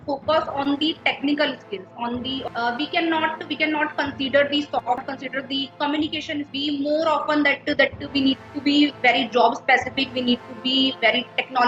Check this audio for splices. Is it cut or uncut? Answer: cut